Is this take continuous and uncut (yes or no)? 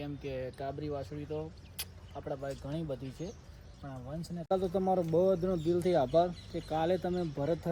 no